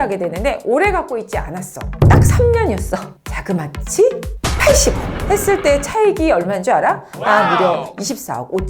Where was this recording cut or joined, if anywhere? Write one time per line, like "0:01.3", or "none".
0:03.1
0:05.1